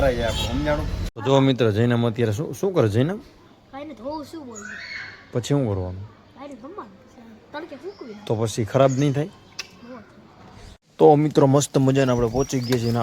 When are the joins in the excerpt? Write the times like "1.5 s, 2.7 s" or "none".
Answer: 1.0 s, 10.8 s